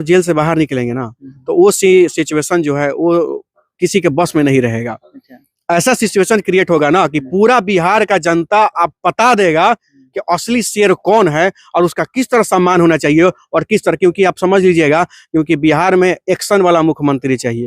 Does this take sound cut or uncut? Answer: uncut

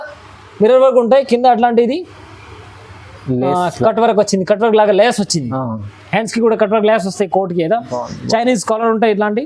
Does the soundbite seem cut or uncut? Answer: uncut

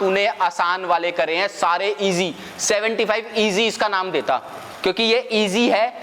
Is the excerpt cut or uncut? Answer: uncut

